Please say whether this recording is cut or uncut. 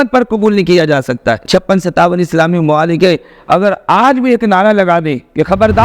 cut